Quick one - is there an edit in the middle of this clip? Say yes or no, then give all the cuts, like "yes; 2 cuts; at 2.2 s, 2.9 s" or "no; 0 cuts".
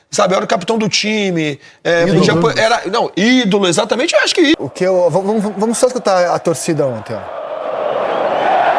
yes; 1 cut; at 4.6 s